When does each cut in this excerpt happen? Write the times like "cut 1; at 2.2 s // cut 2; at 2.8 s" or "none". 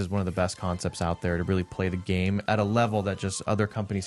cut 1; at 2.4 s